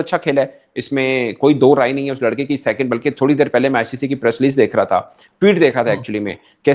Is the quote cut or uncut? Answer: uncut